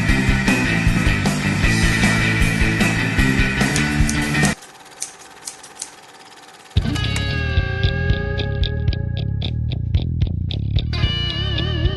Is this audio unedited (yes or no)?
yes